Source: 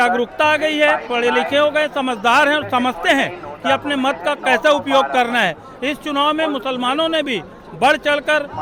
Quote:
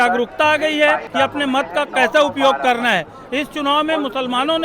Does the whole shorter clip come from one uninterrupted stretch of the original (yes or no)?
no